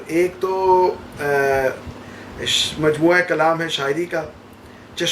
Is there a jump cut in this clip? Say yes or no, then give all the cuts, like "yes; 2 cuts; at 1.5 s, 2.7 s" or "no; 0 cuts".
no; 0 cuts